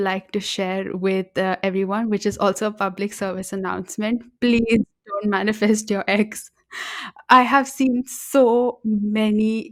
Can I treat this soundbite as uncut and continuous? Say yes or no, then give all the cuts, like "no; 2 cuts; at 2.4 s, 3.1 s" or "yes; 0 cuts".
yes; 0 cuts